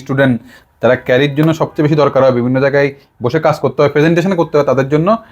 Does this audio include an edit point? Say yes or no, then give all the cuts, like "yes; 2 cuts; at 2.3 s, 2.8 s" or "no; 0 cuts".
no; 0 cuts